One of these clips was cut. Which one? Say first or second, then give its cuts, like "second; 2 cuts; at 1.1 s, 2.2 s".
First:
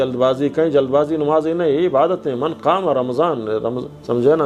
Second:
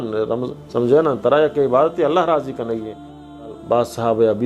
second; 1 cut; at 3.4 s